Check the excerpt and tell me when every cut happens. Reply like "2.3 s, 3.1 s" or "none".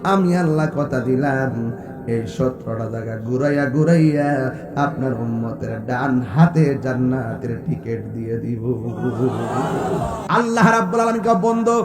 10.2 s